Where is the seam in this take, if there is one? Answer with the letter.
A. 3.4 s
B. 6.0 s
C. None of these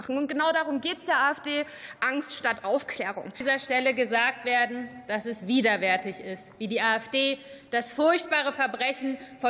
A